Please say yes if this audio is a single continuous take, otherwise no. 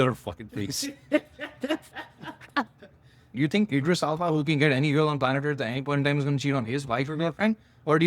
no